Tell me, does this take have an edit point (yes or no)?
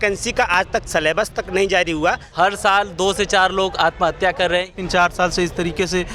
yes